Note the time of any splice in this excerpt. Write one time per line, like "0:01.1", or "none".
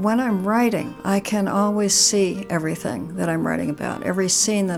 0:00.9